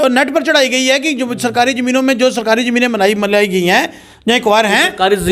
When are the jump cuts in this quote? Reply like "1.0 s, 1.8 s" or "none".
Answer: none